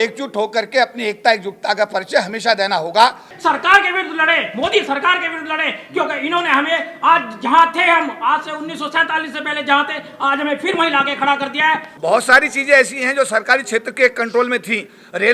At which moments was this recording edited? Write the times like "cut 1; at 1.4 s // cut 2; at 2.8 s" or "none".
cut 1; at 3.3 s // cut 2; at 11.9 s

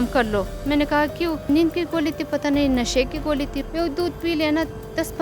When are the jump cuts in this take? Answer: cut 1; at 1.5 s // cut 2; at 3.6 s

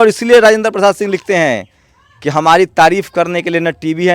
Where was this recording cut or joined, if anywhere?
none

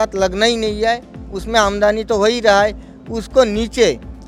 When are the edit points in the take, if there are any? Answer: none

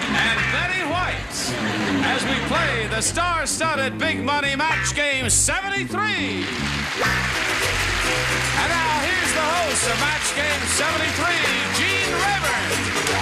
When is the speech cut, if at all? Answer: none

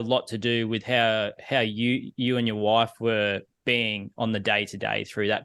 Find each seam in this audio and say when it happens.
none

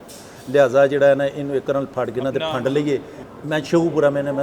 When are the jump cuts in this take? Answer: cut 1; at 3.1 s

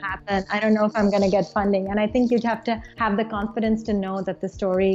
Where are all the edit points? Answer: none

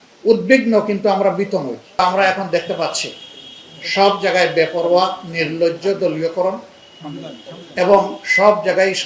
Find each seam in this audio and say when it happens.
cut 1; at 2.0 s

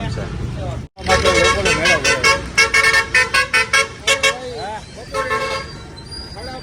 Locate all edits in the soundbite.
cut 1; at 1.0 s

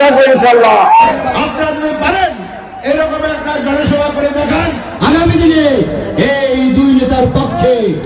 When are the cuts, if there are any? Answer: cut 1; at 4.9 s

